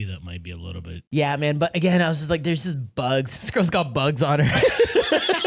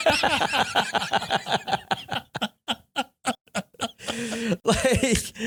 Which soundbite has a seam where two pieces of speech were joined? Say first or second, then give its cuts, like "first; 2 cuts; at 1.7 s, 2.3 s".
first; 1 cut; at 1.0 s